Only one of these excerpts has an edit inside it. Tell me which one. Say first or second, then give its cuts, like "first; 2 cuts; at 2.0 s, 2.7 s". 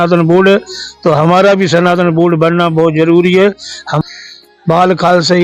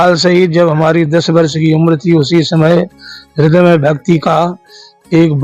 first; 1 cut; at 3.9 s